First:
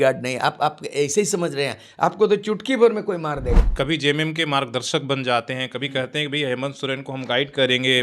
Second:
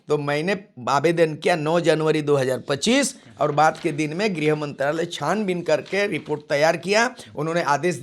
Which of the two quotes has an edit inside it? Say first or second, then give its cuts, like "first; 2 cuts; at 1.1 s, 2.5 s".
first; 1 cut; at 3.7 s